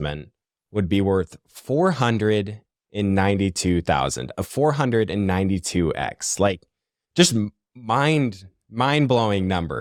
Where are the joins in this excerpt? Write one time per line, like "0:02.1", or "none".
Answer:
none